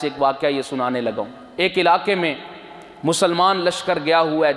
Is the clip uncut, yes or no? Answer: no